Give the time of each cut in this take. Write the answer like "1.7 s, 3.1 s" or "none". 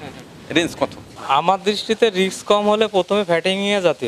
1.2 s